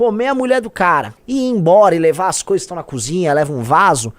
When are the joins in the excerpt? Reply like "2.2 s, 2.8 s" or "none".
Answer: 1.2 s